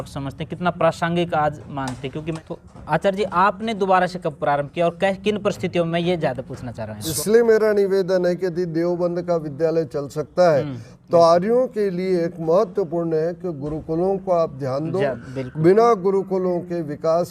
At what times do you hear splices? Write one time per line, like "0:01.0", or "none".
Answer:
0:02.4
0:07.1